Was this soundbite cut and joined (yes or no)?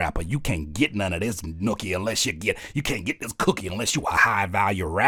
no